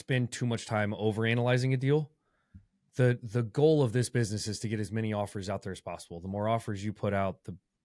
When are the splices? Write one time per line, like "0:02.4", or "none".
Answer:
none